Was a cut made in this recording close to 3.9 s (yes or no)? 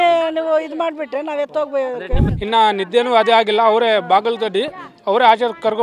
no